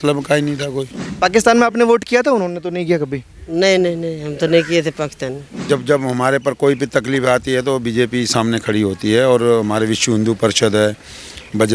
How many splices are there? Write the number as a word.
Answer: two